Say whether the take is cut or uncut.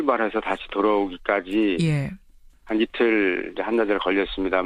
cut